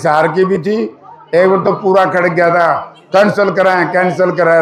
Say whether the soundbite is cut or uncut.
uncut